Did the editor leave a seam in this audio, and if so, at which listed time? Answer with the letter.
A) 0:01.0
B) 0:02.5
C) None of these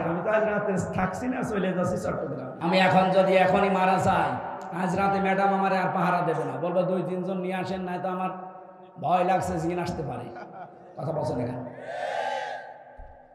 B